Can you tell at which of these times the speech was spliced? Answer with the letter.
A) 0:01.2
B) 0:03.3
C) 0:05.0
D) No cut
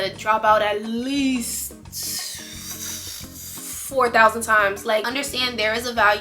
C